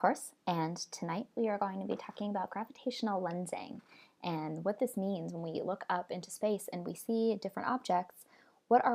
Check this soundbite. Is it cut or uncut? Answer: uncut